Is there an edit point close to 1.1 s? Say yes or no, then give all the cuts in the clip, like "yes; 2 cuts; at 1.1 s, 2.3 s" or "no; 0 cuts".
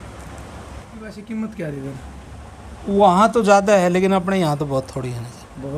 yes; 1 cut; at 1.1 s